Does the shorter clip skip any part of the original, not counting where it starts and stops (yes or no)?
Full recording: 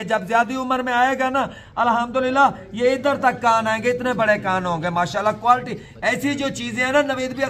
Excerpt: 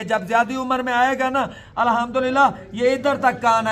no